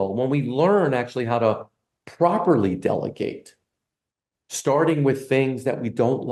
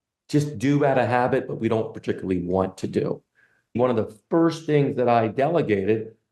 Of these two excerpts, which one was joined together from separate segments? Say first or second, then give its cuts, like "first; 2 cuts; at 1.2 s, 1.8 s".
second; 1 cut; at 3.7 s